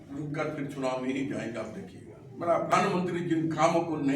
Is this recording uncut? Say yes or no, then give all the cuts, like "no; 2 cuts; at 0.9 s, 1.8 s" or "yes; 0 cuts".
no; 1 cut; at 2.7 s